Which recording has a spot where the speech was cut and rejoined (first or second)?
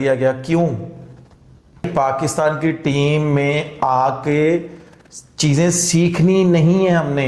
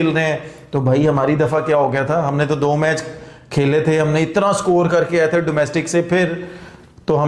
first